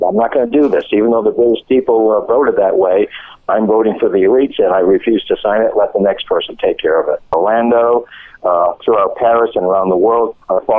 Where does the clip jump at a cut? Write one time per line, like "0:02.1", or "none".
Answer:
0:07.3